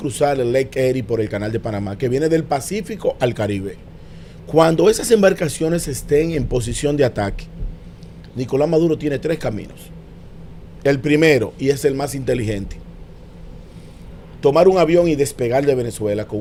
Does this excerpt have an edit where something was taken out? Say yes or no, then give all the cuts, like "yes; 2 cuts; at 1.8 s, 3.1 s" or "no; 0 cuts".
no; 0 cuts